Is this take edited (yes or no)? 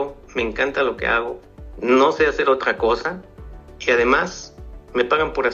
no